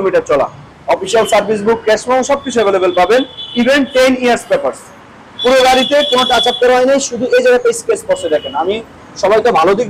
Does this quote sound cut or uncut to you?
uncut